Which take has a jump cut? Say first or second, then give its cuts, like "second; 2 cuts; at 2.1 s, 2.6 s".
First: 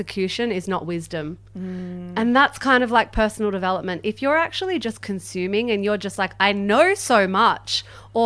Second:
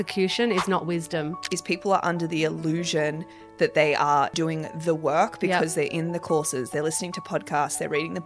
second; 3 cuts; at 1.4 s, 4.3 s, 6.7 s